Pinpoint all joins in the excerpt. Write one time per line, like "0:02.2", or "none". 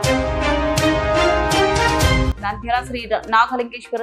0:02.3